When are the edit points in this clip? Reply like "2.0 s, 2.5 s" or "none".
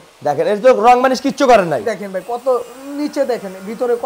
none